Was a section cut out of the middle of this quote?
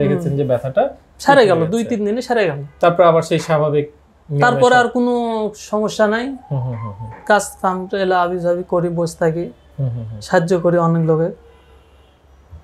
no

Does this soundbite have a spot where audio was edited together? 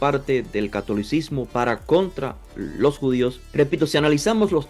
yes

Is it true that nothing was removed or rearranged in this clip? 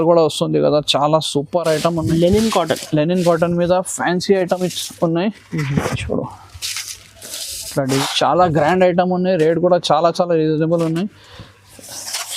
no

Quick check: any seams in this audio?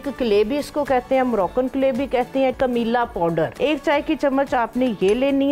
yes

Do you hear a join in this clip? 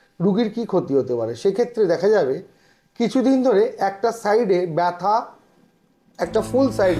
no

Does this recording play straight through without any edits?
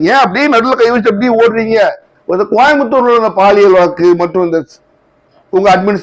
no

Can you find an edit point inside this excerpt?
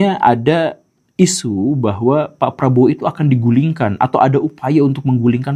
no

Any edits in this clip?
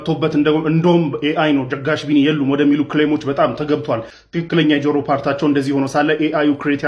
yes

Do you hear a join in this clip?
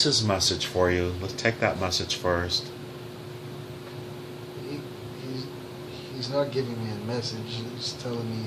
no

